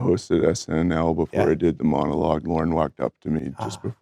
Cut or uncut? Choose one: uncut